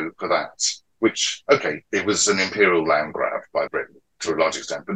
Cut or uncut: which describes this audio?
cut